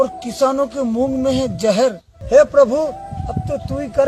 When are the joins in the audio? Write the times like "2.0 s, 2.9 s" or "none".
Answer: 2.1 s